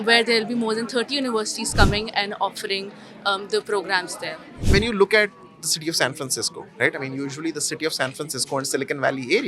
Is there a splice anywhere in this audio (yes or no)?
yes